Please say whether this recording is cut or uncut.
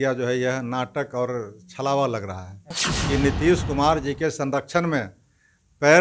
cut